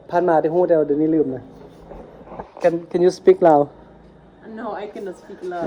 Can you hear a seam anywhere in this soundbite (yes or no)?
no